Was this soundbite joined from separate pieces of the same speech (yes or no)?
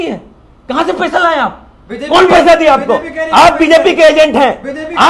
no